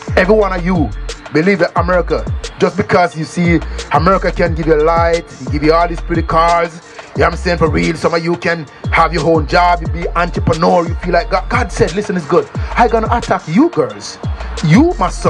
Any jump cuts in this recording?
no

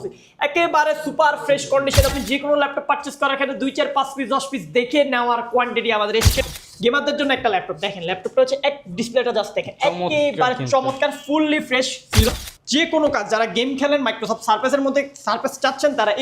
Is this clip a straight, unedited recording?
no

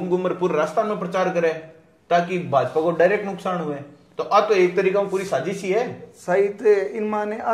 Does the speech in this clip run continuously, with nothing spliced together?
yes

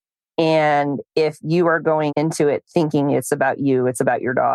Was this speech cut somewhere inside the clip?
yes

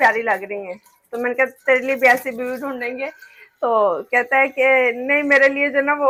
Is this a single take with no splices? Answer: yes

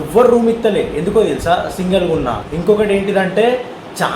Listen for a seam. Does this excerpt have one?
yes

